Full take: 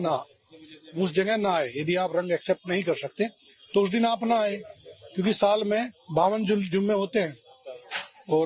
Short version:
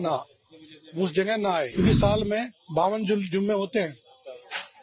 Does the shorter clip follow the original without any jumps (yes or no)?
no